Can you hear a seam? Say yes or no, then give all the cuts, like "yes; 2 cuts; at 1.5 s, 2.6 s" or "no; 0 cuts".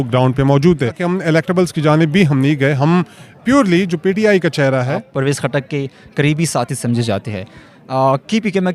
yes; 2 cuts; at 1.1 s, 5.0 s